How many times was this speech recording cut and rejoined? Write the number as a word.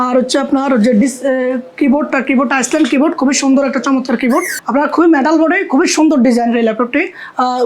one